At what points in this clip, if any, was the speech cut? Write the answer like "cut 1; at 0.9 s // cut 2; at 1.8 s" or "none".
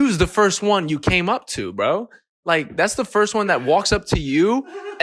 none